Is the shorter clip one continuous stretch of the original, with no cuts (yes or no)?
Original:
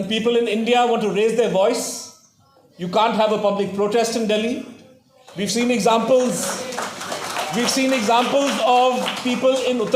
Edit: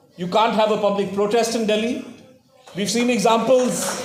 yes